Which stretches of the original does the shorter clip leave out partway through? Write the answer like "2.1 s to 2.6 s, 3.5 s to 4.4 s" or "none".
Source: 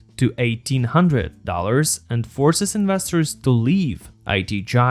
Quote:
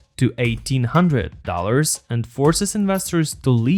none